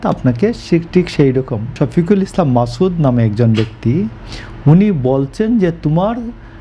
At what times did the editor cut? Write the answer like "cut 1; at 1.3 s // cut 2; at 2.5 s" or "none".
cut 1; at 1.8 s